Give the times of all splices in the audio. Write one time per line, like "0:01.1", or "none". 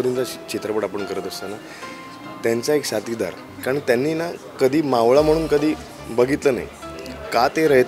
0:03.5